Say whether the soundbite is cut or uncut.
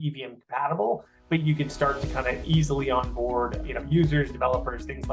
cut